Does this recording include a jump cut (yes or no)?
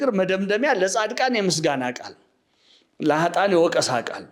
no